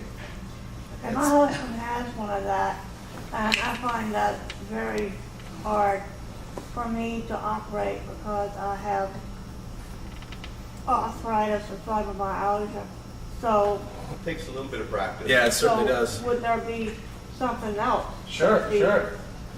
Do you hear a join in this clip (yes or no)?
no